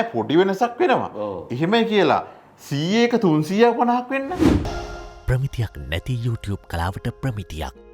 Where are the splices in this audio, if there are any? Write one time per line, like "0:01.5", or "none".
0:04.6